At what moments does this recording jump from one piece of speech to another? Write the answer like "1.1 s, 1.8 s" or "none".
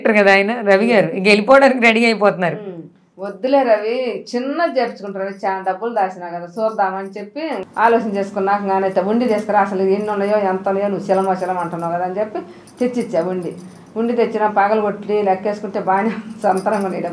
7.6 s